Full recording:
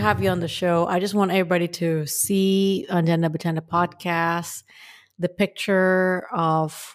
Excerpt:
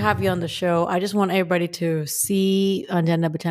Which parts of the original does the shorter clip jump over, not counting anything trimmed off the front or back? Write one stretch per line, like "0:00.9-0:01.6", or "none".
none